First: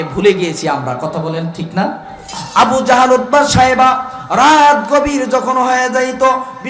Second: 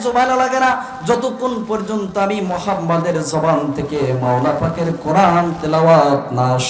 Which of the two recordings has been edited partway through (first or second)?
first